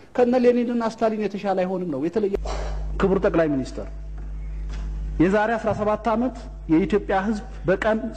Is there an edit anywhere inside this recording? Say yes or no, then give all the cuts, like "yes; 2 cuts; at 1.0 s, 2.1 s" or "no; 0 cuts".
yes; 1 cut; at 2.4 s